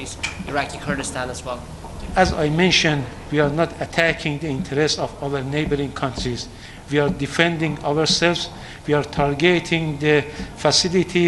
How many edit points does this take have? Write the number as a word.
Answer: zero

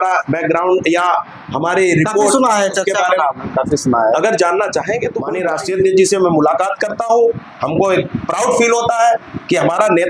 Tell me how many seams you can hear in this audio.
one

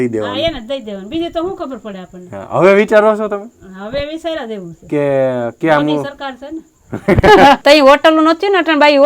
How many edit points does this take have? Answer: one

